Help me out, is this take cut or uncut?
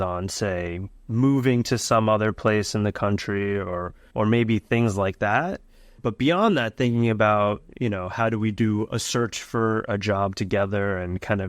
cut